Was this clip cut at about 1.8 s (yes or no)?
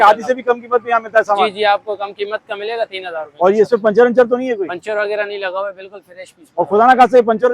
no